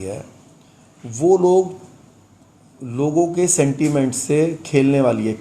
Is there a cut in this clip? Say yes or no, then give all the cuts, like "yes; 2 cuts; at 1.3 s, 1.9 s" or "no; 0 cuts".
no; 0 cuts